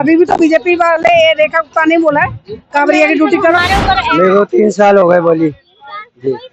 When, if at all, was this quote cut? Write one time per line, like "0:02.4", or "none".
0:04.1